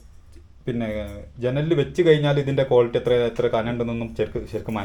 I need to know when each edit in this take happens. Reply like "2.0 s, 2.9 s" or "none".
none